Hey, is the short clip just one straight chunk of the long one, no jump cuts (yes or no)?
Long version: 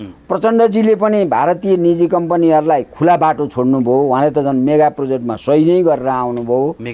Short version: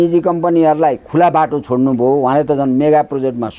yes